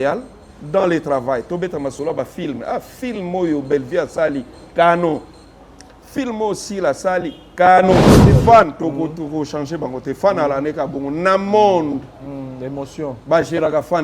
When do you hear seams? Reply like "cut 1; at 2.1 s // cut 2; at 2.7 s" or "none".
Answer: cut 1; at 8.3 s